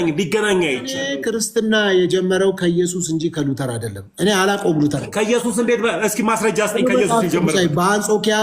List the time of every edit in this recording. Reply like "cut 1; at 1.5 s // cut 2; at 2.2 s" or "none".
cut 1; at 1.1 s